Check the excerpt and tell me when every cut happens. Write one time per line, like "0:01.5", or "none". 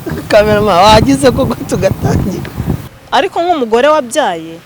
0:02.9